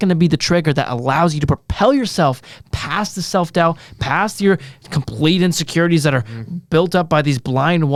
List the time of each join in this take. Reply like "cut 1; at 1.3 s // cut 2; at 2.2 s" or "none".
none